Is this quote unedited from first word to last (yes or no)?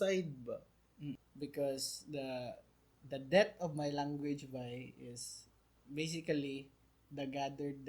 no